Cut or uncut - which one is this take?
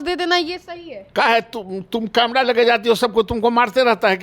uncut